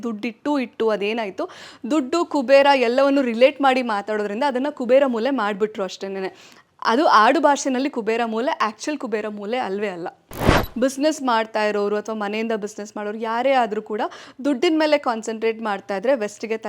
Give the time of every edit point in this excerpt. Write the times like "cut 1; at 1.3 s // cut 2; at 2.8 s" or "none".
cut 1; at 10.6 s

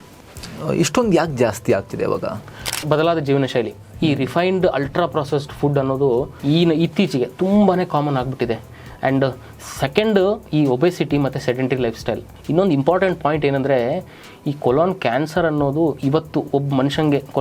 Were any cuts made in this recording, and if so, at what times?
cut 1; at 2.9 s // cut 2; at 6.3 s // cut 3; at 12.3 s

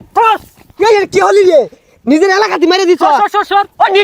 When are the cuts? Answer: none

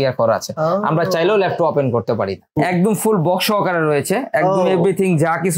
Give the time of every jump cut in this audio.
cut 1; at 2.6 s

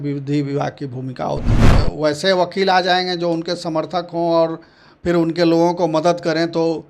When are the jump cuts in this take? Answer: cut 1; at 1.7 s

